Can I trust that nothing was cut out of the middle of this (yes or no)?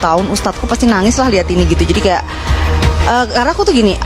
yes